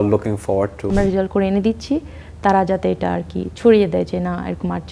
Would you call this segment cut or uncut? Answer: cut